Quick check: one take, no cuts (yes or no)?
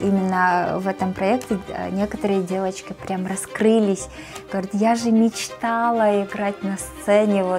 yes